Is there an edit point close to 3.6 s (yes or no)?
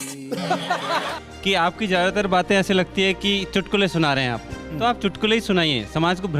no